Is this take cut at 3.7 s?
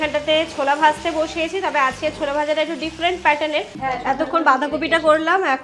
yes; 1 cut; at 3.7 s

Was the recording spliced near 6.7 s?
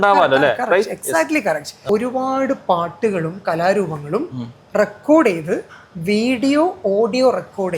no; 1 cut; at 1.7 s

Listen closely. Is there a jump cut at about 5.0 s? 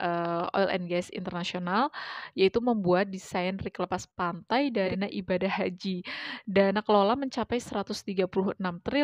yes; 1 cut; at 5.0 s

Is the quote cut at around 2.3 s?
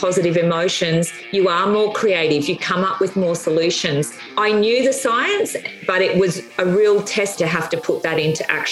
no; 2 cuts; at 4.3 s, 7.3 s

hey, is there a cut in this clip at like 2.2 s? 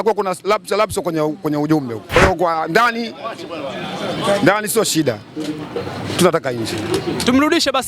yes; 1 cut; at 2.2 s

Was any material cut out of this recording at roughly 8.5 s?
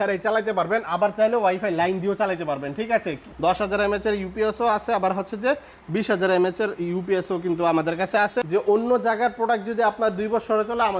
yes; 2 cuts; at 3.2 s, 8.5 s

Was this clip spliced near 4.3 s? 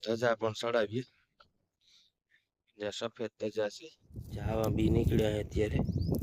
yes; 1 cut; at 4.3 s

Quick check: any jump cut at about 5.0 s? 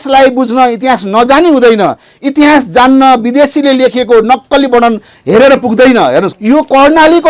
no; 1 cut; at 6.3 s

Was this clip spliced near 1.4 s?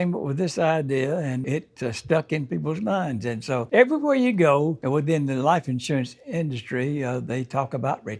yes; 1 cut; at 1.4 s

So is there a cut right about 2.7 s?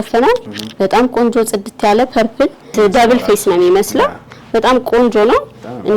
yes; 1 cut; at 2.7 s

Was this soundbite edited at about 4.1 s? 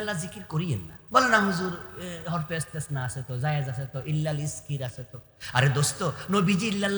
no; 1 cut; at 0.9 s

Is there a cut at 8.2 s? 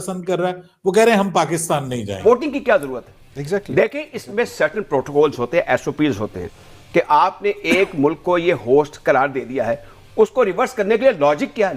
no; 1 cut; at 2.2 s

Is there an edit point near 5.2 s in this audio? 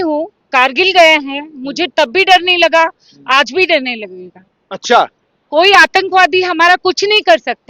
no; 0 cuts

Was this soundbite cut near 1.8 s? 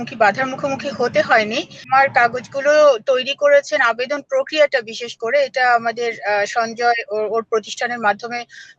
yes; 1 cut; at 1.8 s

